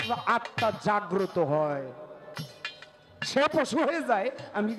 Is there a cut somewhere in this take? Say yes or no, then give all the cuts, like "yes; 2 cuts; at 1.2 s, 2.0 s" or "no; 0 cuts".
no; 0 cuts